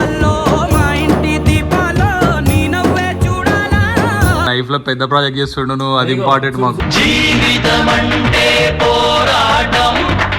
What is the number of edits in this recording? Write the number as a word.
one